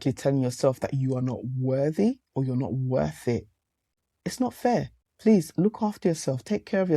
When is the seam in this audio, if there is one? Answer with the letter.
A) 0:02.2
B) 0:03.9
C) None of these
B